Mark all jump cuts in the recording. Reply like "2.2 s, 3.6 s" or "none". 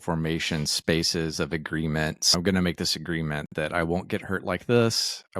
2.3 s